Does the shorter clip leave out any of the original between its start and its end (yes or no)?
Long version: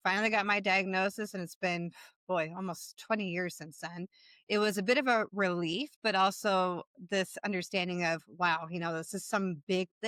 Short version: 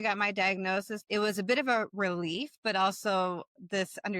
yes